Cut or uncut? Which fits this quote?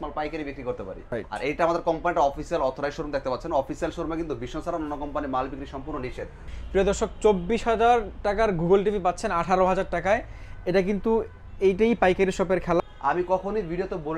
cut